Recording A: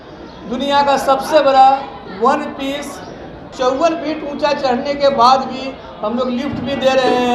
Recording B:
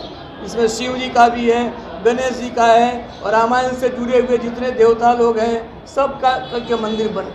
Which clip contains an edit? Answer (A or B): A